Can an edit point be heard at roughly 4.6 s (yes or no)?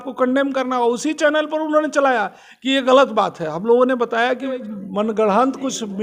yes